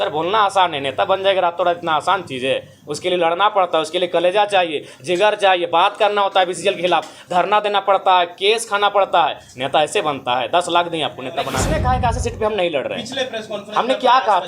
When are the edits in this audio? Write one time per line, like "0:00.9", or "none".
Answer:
0:11.6